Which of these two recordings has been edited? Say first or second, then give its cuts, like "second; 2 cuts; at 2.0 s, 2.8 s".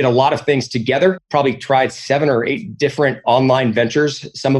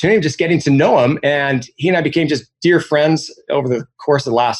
first; 1 cut; at 1.2 s